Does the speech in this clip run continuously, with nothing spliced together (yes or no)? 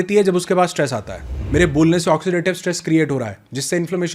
no